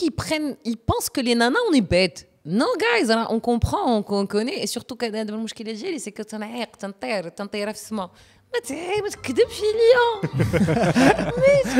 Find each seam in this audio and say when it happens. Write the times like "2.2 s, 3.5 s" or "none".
none